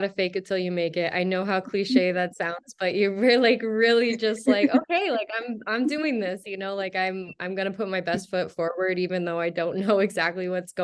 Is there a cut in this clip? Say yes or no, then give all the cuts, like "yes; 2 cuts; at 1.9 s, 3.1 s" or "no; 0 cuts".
no; 0 cuts